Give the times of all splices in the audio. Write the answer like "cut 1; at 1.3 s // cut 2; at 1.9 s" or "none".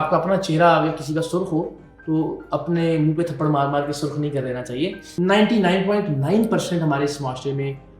cut 1; at 5.1 s